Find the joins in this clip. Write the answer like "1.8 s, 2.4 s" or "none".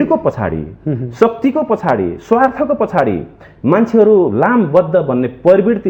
none